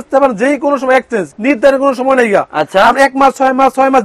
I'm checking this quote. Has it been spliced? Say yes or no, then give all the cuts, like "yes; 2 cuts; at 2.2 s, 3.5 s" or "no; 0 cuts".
yes; 1 cut; at 1.3 s